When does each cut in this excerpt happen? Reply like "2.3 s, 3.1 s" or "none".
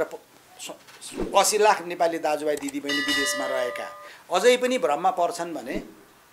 none